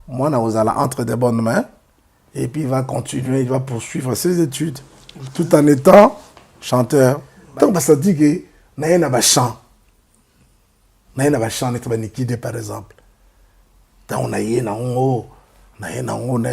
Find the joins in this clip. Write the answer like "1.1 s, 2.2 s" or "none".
7.3 s